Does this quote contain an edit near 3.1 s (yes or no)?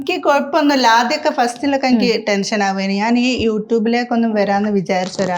no